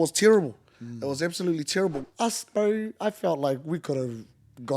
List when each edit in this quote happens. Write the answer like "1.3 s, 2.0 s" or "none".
2.0 s